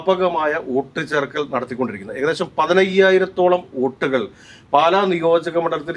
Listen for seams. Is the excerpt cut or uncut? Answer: uncut